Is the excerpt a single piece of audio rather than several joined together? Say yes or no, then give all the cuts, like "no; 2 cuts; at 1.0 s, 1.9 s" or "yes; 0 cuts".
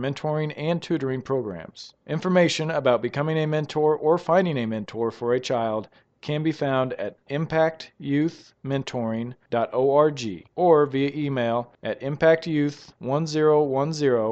yes; 0 cuts